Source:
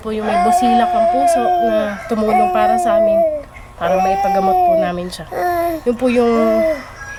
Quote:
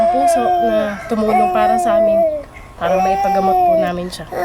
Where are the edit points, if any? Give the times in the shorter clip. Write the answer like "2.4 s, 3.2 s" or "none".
none